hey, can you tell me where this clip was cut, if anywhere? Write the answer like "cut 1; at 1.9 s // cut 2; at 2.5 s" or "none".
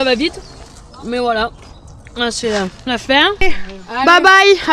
cut 1; at 3.5 s